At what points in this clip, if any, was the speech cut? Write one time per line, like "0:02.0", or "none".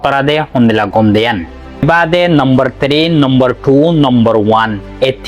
0:01.8

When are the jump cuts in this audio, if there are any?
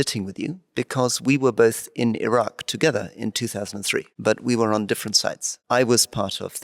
0:04.1
0:05.5

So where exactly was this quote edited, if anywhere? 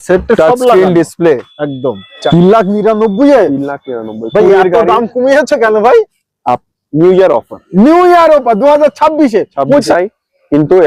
0:02.1
0:09.9

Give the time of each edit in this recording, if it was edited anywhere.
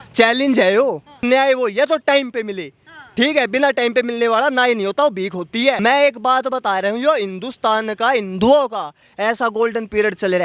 0:01.2
0:05.8

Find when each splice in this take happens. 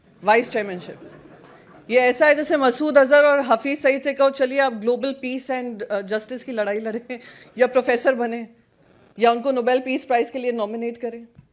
none

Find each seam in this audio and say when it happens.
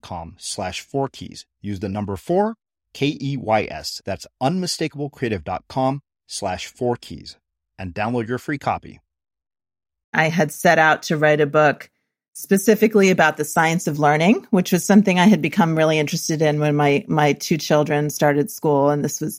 0:10.1

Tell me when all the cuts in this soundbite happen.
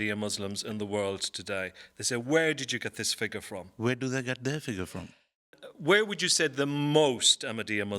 none

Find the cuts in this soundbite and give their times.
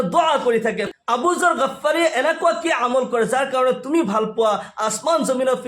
0:00.9

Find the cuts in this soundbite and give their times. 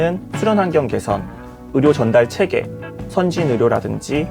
none

